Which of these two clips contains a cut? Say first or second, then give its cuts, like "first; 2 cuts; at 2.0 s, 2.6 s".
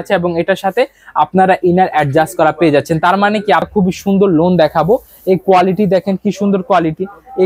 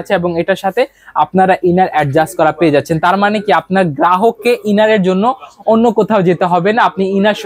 first; 1 cut; at 3.7 s